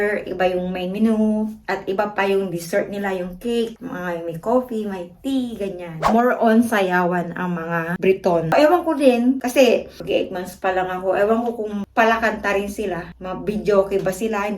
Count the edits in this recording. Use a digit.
2